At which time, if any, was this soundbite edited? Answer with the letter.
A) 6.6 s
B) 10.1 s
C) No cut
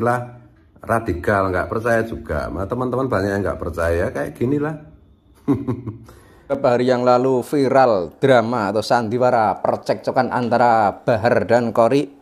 A